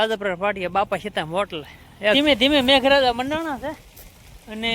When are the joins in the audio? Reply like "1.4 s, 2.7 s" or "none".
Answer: 2.1 s